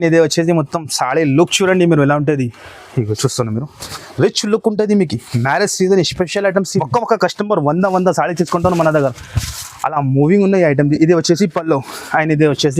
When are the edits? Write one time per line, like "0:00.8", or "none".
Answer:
0:06.8

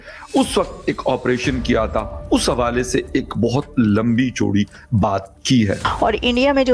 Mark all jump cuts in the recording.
0:05.8

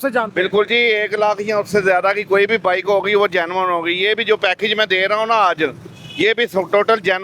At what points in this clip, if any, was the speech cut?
none

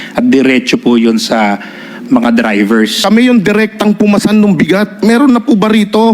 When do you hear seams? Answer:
0:03.0

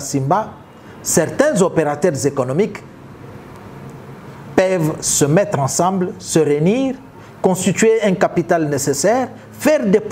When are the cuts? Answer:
none

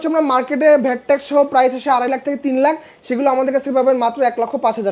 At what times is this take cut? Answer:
none

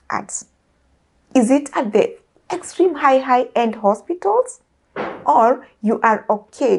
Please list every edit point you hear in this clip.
none

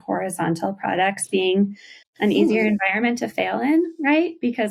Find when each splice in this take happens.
none

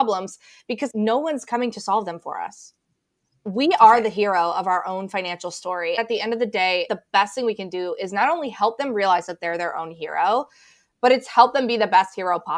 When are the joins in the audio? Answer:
0:00.9
0:06.0
0:06.9

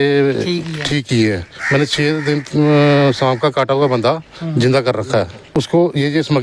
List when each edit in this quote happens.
0:05.5

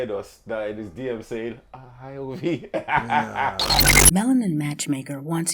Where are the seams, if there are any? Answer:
0:03.8

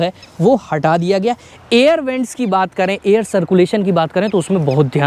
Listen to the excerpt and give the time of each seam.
none

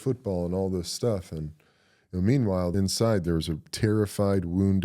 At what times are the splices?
0:02.7
0:03.7

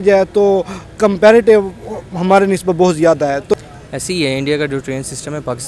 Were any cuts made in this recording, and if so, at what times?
0:03.5

